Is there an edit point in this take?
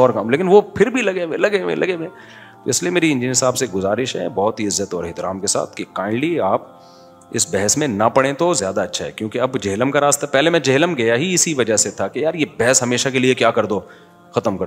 no; 0 cuts

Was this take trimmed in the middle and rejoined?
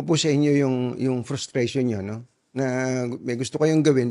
no; 0 cuts

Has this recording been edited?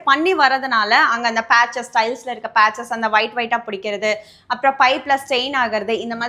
no; 0 cuts

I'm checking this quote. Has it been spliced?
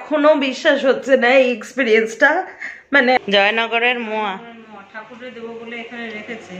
yes; 1 cut; at 3.2 s

